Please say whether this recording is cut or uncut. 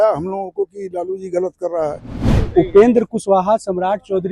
cut